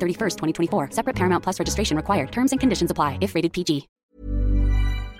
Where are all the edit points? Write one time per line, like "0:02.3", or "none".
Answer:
0:03.9